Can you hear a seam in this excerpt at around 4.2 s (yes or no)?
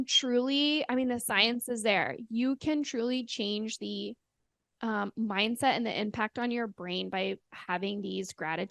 no